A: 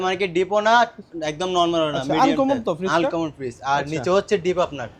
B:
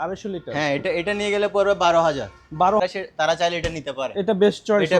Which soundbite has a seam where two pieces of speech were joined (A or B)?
B